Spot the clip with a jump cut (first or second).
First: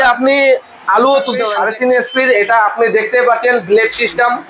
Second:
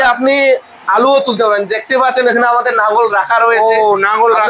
first